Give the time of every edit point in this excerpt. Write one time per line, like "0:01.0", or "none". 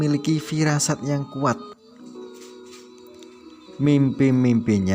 0:01.7
0:03.8